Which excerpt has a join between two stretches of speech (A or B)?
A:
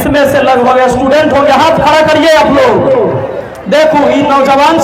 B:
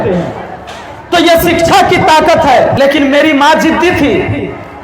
B